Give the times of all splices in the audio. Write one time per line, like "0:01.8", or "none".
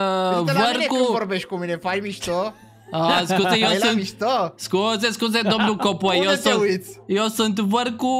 none

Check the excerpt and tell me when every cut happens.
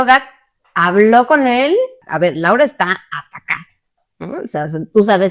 0:02.0

